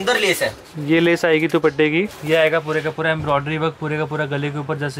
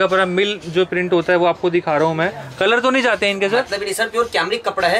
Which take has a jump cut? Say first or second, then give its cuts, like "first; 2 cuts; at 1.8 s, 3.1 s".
first; 1 cut; at 2.2 s